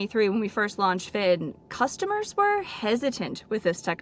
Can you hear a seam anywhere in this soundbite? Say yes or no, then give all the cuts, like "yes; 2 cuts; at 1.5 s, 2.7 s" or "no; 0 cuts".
no; 0 cuts